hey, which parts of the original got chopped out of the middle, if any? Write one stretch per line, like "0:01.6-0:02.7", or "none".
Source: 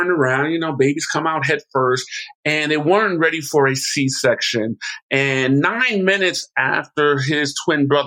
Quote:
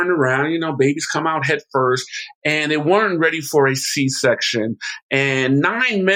none